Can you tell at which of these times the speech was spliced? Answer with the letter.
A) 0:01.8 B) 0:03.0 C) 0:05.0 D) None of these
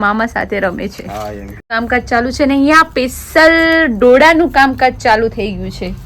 A